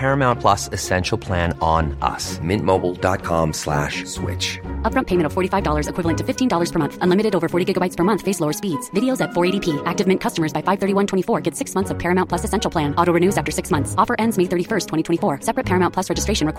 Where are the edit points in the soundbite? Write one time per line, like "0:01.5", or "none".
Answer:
none